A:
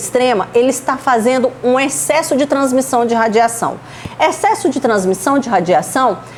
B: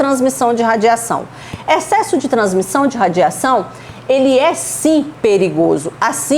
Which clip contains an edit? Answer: B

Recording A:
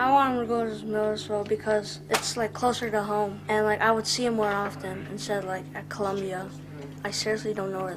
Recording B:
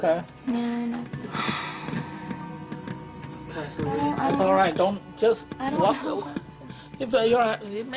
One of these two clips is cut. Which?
B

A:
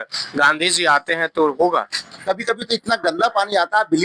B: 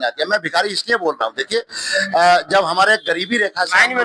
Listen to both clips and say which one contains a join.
A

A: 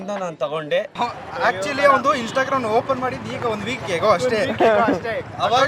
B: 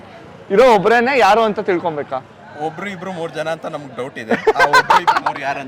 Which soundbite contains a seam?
A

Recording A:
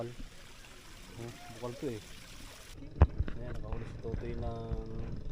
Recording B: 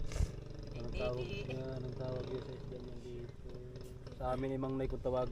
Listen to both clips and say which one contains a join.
A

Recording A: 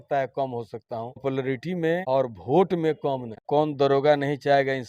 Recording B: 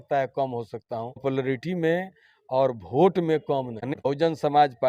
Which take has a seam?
A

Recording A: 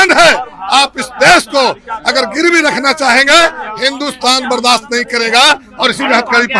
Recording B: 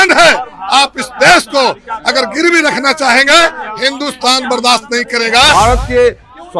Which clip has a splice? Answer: B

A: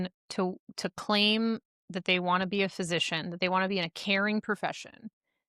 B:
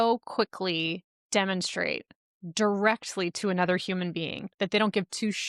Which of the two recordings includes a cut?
B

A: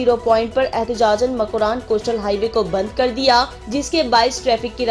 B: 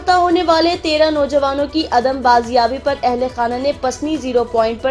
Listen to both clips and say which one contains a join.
A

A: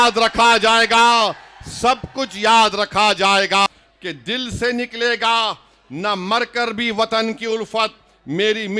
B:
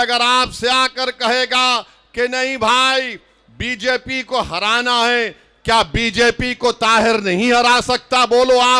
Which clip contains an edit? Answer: A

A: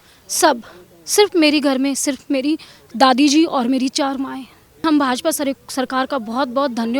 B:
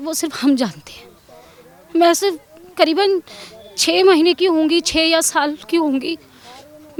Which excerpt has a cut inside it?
A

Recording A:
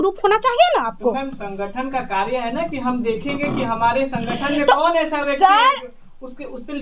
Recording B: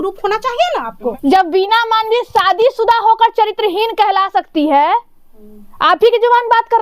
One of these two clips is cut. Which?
B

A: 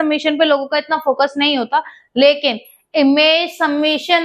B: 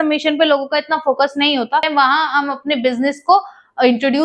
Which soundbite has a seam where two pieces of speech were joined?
B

